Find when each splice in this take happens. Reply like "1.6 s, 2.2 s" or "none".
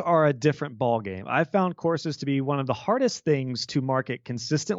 none